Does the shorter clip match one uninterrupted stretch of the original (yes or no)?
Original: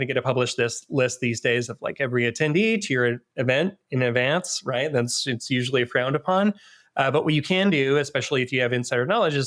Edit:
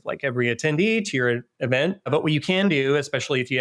no